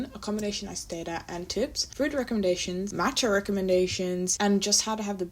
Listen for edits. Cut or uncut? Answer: cut